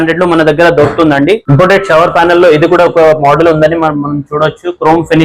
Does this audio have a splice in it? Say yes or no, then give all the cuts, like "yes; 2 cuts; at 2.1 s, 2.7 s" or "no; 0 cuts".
yes; 1 cut; at 1.4 s